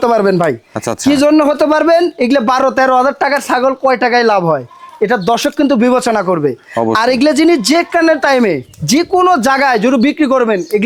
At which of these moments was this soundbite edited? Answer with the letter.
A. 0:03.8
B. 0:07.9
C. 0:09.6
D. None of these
D